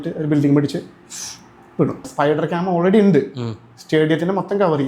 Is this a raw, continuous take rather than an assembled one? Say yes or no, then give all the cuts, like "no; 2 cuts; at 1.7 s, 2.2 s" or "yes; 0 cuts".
no; 1 cut; at 2.1 s